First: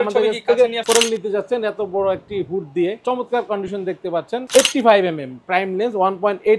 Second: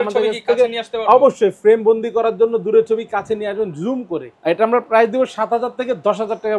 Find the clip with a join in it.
first; 3 cuts; at 0.8 s, 3.0 s, 4.4 s

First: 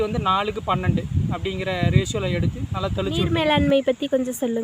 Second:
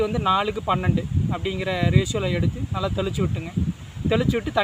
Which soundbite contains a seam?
first; 1 cut; at 3.3 s

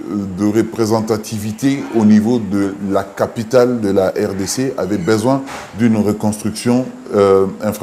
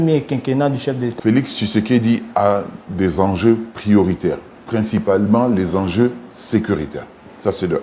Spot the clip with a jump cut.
second; 1 cut; at 1.1 s

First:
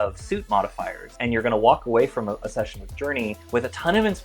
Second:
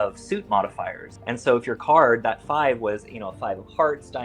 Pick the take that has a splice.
first; 1 cut; at 1.1 s

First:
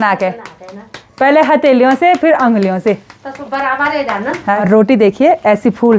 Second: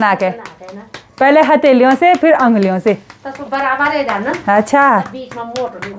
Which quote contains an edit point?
first; 1 cut; at 4.6 s

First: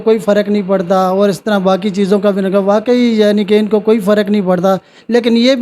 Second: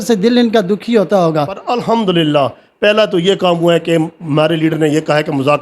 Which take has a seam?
second; 1 cut; at 1.6 s

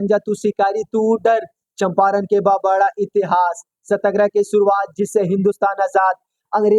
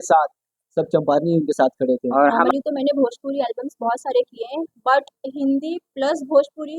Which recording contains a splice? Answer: second; 1 cut; at 2.1 s

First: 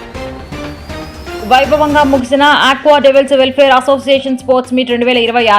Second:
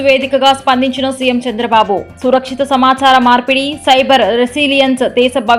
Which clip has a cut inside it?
first; 1 cut; at 1.4 s

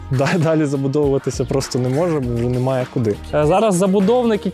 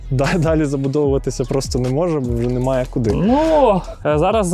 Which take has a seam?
first; 1 cut; at 3.2 s

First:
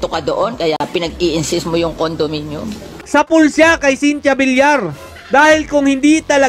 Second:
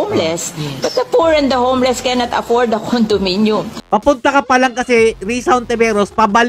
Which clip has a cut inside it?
second; 1 cut; at 3.8 s

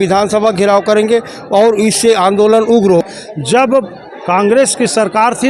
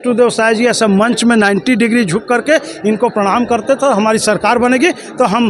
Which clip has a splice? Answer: first; 1 cut; at 3.1 s

